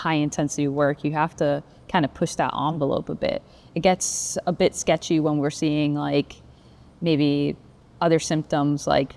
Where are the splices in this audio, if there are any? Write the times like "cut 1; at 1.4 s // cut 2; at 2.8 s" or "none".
none